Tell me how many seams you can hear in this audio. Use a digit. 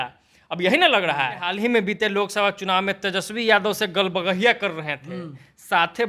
1